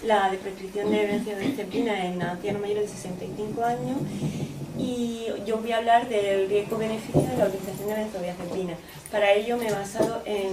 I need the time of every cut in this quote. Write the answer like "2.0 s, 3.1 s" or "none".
9.4 s